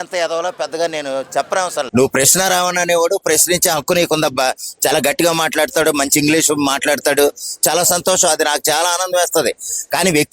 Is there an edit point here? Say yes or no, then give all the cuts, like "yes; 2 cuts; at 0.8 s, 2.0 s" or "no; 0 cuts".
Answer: yes; 1 cut; at 1.8 s